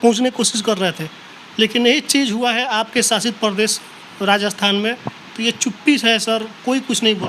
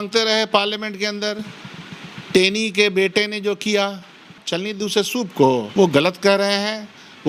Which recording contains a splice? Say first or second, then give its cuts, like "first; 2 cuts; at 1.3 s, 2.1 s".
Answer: second; 2 cuts; at 4.4 s, 5.7 s